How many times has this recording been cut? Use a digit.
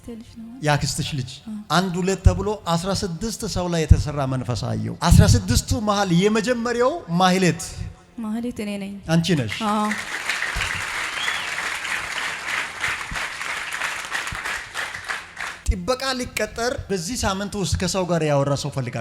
2